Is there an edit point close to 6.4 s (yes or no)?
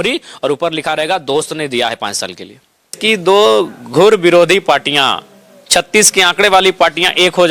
no